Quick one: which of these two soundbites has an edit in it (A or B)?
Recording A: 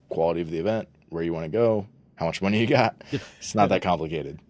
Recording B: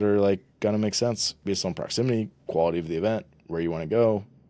B